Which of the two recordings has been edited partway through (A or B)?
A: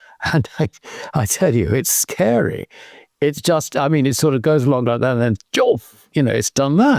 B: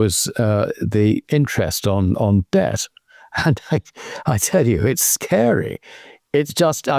B